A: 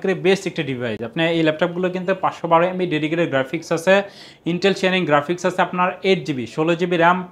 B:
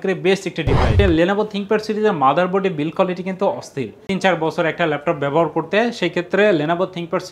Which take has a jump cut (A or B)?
B